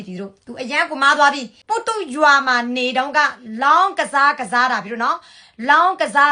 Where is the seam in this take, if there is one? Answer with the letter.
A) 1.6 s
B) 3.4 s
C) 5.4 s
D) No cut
A